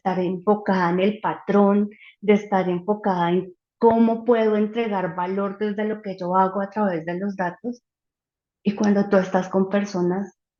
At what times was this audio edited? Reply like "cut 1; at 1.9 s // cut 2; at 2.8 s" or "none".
none